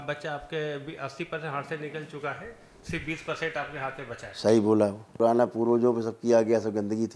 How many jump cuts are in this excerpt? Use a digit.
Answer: 1